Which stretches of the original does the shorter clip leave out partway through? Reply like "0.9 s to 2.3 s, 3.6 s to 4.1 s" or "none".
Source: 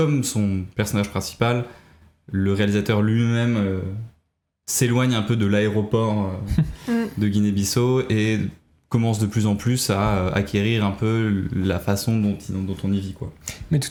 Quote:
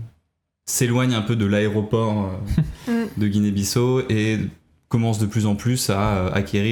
none